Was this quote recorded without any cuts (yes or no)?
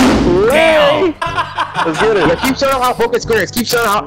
no